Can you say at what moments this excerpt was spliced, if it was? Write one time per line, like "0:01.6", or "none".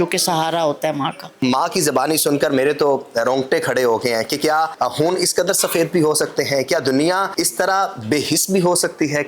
0:01.3
0:04.7
0:07.3